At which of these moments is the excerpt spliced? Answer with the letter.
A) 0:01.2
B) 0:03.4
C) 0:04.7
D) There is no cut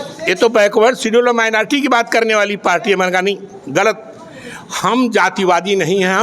D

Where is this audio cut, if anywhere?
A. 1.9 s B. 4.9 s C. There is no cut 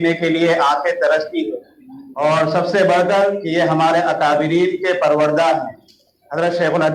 C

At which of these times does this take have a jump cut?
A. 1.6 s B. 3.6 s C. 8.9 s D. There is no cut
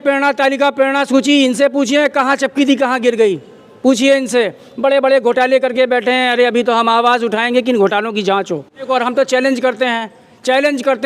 C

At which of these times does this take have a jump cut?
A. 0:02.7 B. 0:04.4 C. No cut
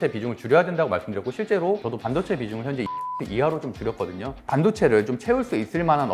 B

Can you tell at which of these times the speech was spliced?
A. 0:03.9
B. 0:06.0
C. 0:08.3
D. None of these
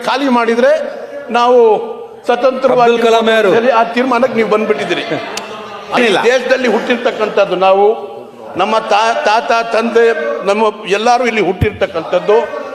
B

